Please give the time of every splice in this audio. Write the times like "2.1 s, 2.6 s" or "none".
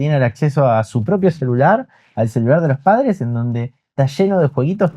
none